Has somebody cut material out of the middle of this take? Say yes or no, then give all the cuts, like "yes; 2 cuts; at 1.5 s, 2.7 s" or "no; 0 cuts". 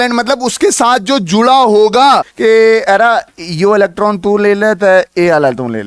yes; 1 cut; at 2.3 s